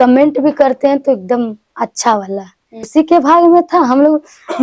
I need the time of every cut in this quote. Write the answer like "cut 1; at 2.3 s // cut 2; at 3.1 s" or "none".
cut 1; at 2.9 s